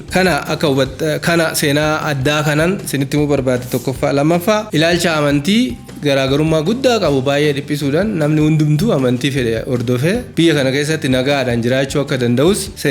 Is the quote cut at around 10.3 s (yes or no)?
no